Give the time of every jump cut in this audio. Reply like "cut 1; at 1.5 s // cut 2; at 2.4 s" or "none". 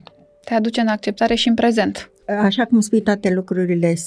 cut 1; at 2.1 s